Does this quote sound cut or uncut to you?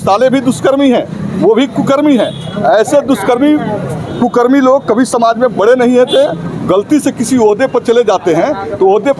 uncut